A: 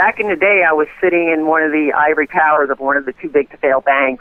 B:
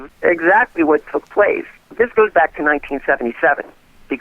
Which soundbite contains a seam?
B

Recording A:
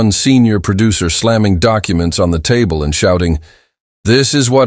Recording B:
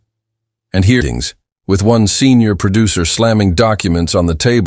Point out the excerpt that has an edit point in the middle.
B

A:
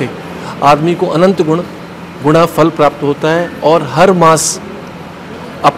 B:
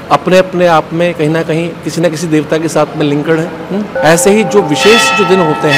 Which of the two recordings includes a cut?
B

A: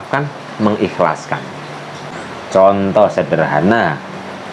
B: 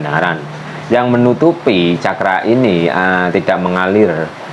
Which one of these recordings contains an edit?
A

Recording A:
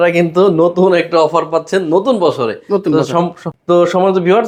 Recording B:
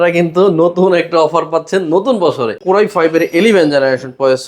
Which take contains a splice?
B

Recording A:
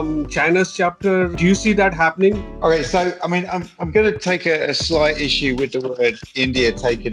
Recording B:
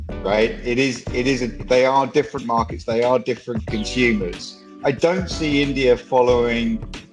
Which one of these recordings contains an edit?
A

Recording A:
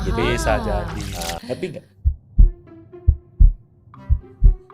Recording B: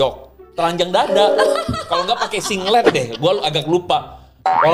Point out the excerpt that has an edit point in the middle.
A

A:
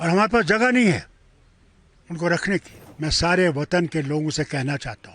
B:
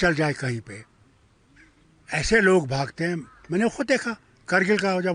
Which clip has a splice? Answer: A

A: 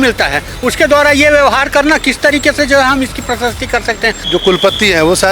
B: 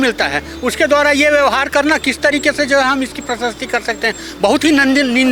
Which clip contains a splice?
A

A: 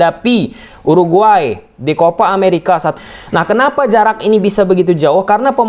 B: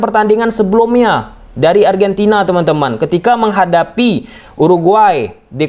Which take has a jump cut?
A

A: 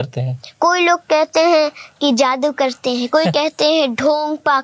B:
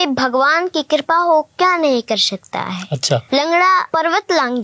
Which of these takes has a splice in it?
B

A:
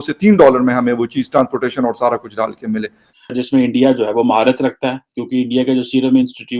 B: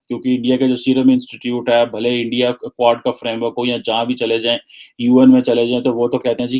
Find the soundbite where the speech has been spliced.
A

